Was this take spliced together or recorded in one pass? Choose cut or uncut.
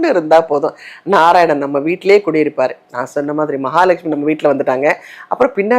uncut